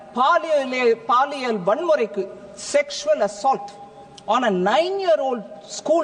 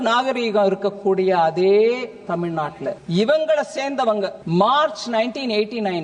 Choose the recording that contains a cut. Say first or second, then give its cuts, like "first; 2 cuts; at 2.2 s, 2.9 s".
second; 2 cuts; at 3.0 s, 4.4 s